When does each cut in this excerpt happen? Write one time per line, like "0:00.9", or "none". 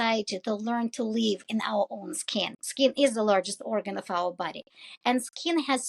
0:02.5